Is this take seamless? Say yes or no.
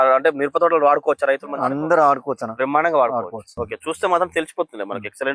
no